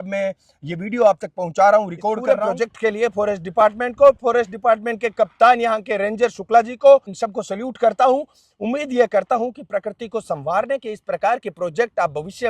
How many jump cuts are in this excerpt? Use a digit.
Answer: 2